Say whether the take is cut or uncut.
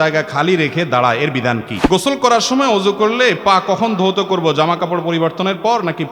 cut